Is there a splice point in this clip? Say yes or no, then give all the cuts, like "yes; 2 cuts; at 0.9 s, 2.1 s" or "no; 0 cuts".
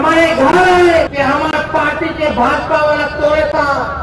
yes; 1 cut; at 1.1 s